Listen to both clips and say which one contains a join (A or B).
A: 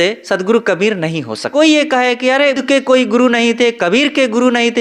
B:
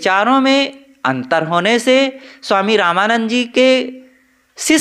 A